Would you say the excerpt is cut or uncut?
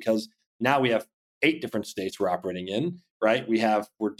uncut